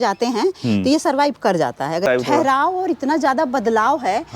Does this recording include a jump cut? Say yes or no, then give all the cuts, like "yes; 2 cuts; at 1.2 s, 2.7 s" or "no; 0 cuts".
yes; 1 cut; at 2.0 s